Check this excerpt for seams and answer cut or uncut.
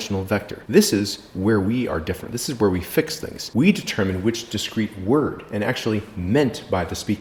uncut